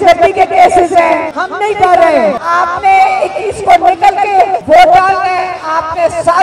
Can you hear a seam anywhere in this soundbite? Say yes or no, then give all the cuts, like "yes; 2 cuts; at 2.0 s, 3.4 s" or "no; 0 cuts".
yes; 3 cuts; at 1.4 s, 2.4 s, 4.6 s